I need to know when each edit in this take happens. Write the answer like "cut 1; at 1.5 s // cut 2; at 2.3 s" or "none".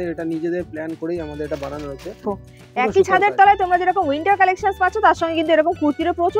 cut 1; at 2.2 s